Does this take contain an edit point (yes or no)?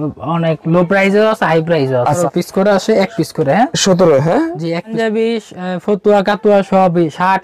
yes